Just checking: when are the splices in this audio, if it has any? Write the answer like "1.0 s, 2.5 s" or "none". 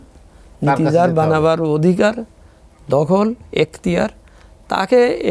none